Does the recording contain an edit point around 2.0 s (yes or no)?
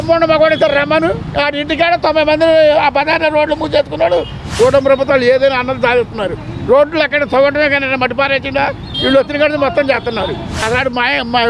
no